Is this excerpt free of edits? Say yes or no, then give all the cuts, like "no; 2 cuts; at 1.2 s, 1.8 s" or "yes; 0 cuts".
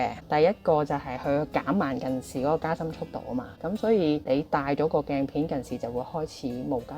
yes; 0 cuts